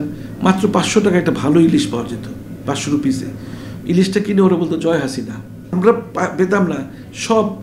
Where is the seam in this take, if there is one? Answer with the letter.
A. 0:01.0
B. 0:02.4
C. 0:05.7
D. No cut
C